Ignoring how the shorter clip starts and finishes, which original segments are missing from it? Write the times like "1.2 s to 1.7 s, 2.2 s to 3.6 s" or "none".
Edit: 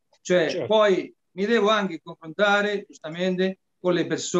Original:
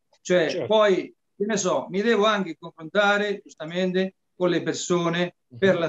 1.3 s to 1.9 s